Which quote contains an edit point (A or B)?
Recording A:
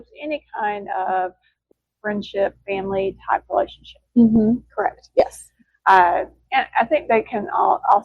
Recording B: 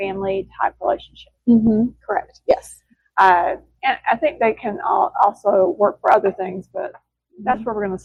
A